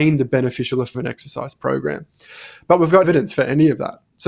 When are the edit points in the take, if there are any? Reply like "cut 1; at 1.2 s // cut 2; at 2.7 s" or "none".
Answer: cut 1; at 3.1 s